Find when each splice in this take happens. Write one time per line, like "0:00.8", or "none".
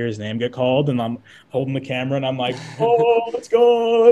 none